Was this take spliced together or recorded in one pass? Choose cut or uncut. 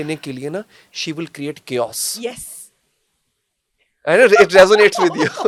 uncut